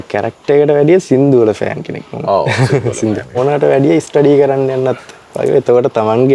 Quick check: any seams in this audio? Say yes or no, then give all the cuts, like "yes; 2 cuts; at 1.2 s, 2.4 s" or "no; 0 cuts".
yes; 1 cut; at 3.4 s